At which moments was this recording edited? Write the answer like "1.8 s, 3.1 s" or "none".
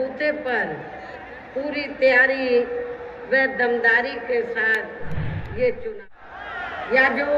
6.1 s